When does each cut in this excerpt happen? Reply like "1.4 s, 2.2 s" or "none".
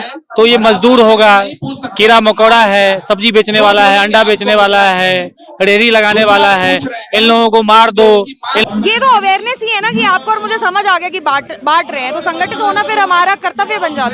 8.6 s